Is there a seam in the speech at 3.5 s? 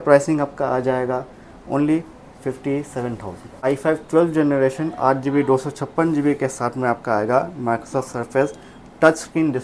yes; 1 cut; at 3.5 s

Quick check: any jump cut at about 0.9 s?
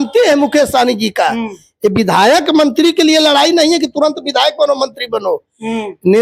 no; 0 cuts

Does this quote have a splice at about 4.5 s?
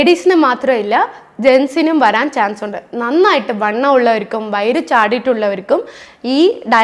no; 0 cuts

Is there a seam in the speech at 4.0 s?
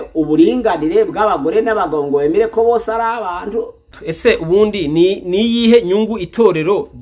yes; 1 cut; at 4.0 s

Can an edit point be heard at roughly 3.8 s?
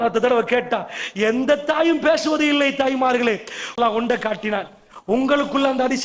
yes; 1 cut; at 3.8 s

